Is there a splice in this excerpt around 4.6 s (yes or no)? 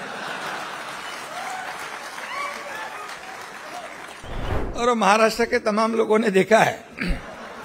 yes